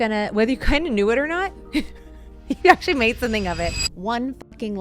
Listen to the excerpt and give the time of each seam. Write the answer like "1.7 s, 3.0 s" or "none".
3.9 s